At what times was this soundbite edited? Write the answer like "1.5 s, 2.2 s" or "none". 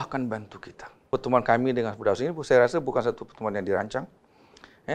1.1 s